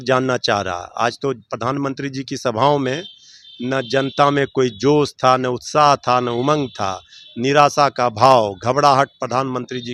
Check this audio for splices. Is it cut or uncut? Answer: uncut